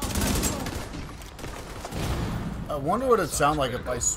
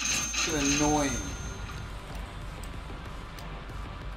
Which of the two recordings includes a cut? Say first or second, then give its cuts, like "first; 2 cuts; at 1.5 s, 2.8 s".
first; 1 cut; at 2.7 s